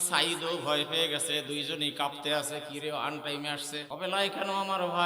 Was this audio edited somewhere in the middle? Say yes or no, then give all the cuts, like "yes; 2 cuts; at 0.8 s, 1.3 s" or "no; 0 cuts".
yes; 1 cut; at 3.9 s